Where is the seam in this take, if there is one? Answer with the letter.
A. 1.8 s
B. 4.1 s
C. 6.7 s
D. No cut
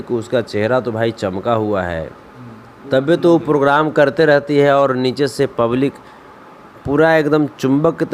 D